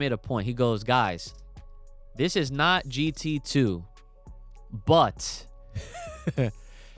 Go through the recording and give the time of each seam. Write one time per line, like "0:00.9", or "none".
none